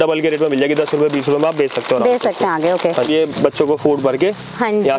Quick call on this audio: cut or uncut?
cut